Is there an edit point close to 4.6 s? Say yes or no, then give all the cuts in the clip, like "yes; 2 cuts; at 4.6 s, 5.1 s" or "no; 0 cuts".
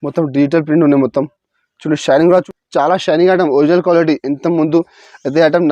no; 1 cut; at 2.5 s